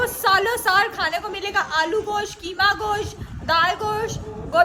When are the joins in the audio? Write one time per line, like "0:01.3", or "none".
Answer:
none